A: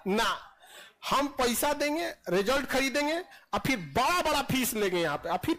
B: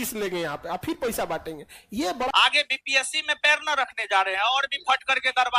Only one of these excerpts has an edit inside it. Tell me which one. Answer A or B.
B